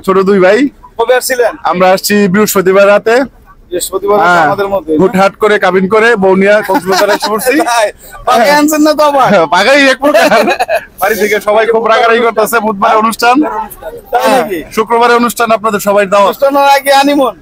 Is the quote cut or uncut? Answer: uncut